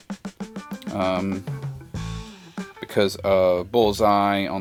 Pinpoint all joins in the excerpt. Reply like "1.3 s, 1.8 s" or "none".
none